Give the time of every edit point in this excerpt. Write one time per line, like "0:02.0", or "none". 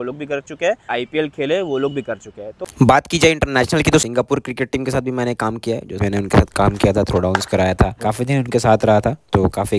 0:00.9
0:02.7
0:06.0